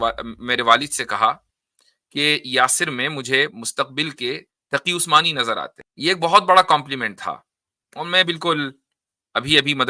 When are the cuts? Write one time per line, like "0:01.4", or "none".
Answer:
0:05.8

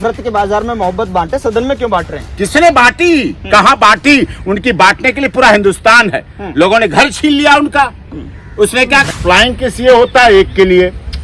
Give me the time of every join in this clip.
0:09.2

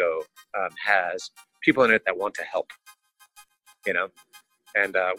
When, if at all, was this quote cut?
0:03.3

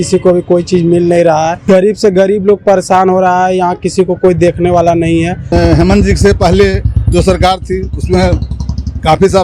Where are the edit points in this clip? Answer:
0:01.6
0:05.4

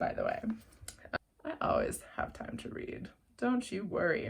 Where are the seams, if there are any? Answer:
0:01.2

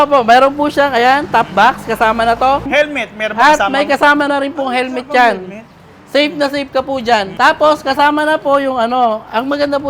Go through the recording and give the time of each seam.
0:02.7
0:07.3

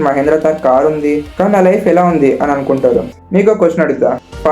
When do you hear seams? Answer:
0:03.1

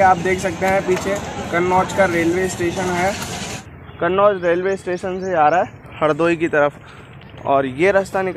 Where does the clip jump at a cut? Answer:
0:03.5

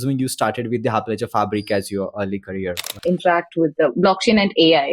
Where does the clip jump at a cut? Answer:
0:03.0

